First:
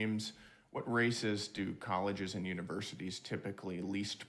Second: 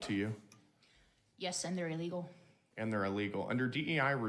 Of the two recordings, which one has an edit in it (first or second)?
first